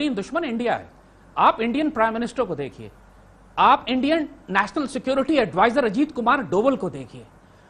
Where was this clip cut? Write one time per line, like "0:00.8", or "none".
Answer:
none